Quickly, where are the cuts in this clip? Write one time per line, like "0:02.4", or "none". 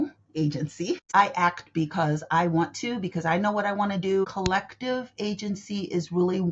0:01.1
0:04.2